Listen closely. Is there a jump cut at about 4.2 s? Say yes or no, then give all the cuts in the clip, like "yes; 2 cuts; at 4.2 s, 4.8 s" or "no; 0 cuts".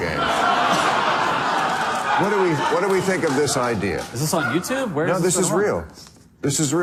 no; 0 cuts